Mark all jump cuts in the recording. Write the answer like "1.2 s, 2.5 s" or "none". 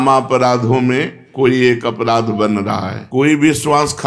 3.0 s

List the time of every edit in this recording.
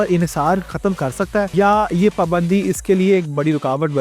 1.5 s

